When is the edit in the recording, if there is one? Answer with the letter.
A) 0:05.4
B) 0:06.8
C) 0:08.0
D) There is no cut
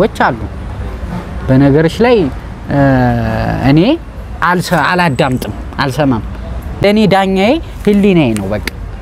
B